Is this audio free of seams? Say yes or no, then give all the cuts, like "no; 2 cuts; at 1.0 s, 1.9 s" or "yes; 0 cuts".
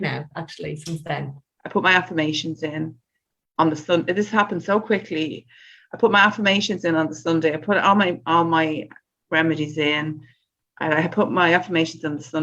no; 1 cut; at 1.4 s